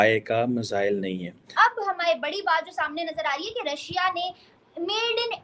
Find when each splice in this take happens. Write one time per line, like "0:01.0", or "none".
0:01.4